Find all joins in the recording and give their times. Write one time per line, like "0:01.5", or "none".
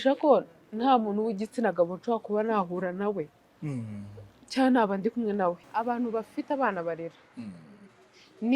0:05.6